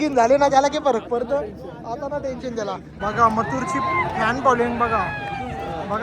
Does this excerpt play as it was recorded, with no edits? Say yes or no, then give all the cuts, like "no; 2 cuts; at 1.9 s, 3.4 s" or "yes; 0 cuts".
no; 1 cut; at 3.0 s